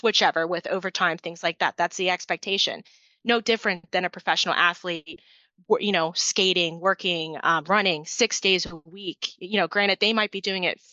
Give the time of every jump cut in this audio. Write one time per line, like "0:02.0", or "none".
none